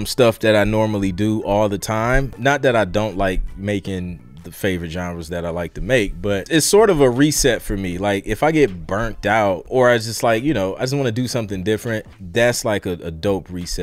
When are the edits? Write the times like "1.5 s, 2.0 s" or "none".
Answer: 2.3 s, 4.2 s, 6.4 s, 9.6 s, 12.1 s

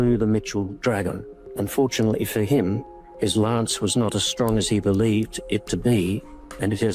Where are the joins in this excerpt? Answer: none

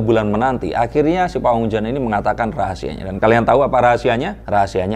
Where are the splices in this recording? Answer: none

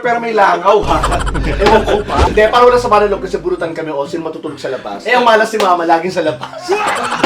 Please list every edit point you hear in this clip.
2.2 s, 5.0 s

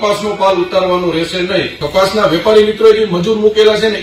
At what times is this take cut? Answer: 1.8 s

